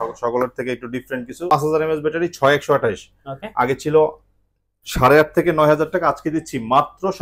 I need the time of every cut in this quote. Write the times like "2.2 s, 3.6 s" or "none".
1.5 s